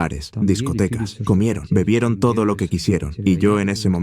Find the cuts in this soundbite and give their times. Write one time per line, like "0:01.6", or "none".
0:03.1